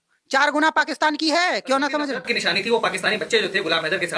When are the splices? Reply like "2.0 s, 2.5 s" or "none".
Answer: none